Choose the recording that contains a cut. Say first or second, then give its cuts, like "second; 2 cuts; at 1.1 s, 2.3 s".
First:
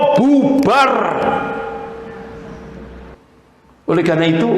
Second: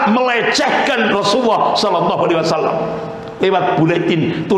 first; 1 cut; at 3.2 s